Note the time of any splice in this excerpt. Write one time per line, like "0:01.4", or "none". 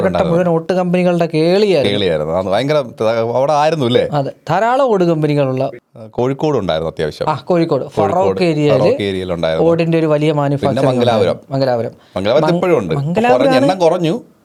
none